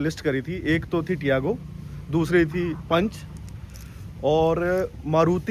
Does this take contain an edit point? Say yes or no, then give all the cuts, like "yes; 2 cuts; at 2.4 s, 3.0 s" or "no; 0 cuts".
no; 0 cuts